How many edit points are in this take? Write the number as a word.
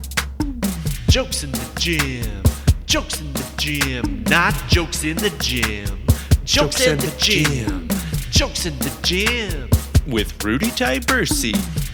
zero